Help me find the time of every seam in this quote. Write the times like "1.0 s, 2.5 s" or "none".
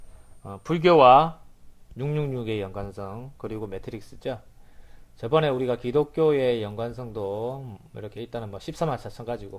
8.3 s